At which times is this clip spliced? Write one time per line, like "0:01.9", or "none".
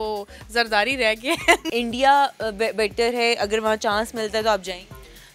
0:01.6